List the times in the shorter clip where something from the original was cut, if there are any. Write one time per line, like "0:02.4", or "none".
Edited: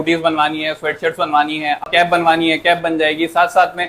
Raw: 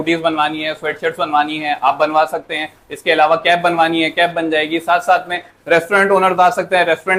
0:01.8

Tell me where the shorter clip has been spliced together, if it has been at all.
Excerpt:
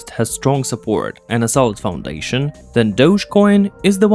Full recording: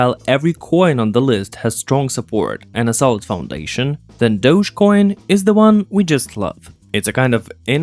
none

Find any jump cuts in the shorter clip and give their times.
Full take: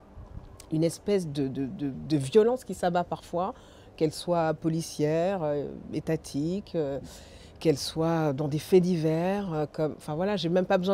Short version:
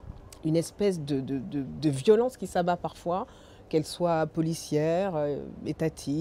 none

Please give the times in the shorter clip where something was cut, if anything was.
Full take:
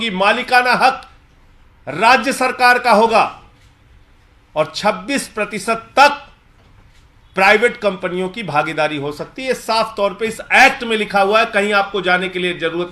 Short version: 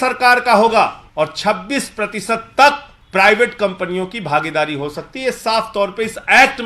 0:01.0
0:02.9

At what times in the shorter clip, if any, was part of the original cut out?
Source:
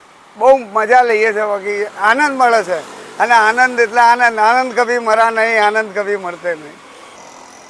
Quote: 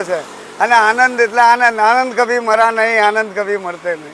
none

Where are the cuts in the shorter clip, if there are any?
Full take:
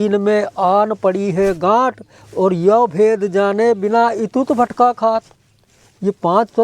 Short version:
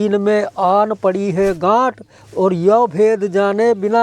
none

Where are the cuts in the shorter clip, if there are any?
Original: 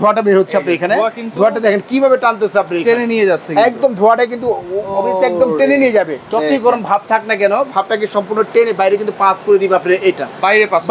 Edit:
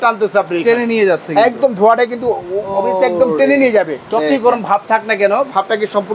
none

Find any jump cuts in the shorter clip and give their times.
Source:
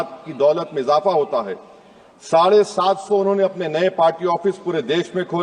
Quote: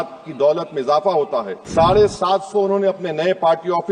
0:01.6

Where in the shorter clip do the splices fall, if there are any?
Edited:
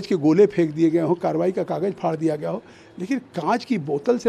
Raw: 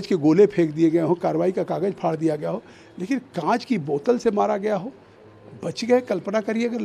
none

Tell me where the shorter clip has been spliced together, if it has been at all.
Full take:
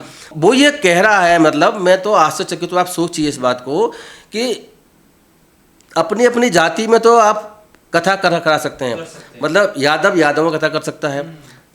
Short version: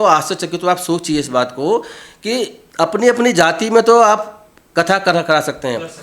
0:02.6

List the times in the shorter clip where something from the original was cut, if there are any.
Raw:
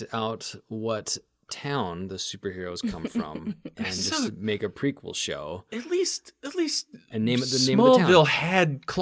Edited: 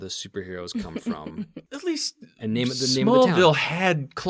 0:01.6

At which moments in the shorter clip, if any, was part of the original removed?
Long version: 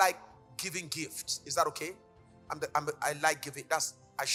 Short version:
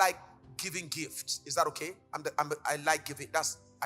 0:02.0

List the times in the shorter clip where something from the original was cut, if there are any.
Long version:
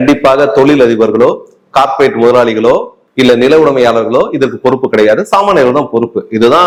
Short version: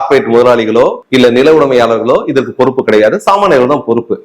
0:01.0

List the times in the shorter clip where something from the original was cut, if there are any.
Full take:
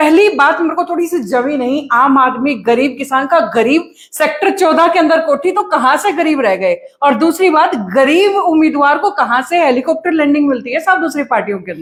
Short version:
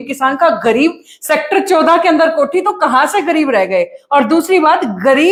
none

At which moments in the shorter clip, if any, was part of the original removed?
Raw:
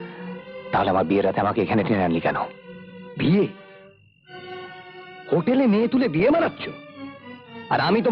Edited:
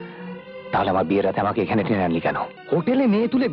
0:02.6

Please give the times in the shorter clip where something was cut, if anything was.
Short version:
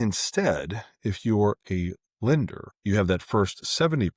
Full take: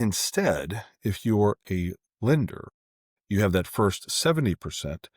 0:02.7

